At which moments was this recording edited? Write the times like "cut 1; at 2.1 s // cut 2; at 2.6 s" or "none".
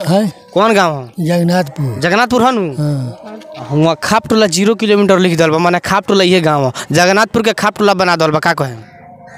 none